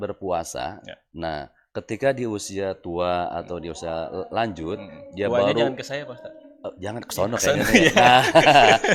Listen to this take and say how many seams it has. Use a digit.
0